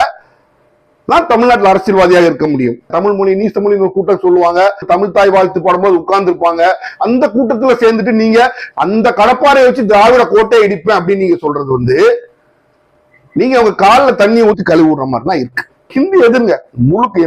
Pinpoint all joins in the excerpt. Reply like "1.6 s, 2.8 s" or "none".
2.9 s, 15.9 s

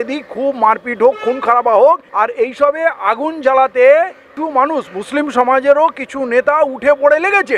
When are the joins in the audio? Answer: 2.1 s, 4.2 s

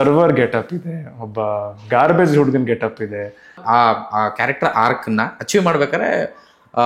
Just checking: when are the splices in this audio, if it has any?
3.6 s

